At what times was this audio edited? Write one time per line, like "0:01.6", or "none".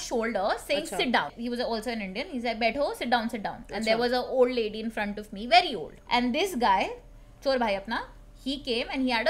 0:01.3
0:06.0